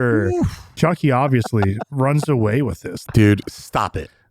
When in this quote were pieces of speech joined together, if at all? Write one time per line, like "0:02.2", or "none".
0:00.8
0:02.9

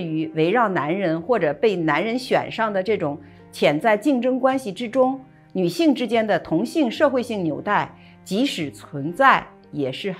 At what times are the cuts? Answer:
none

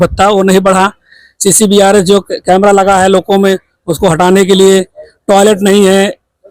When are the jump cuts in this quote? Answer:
none

